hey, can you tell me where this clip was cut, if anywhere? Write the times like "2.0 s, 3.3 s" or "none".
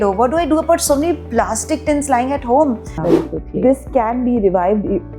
3.0 s